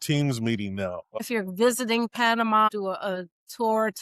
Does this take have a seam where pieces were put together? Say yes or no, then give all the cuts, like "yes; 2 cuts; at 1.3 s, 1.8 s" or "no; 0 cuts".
yes; 2 cuts; at 1.2 s, 2.7 s